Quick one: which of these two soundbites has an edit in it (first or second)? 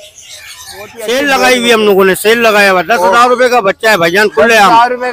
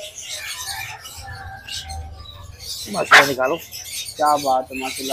first